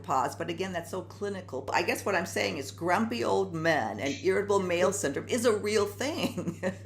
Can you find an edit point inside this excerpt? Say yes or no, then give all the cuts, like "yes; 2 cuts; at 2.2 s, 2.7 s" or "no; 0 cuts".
yes; 1 cut; at 1.7 s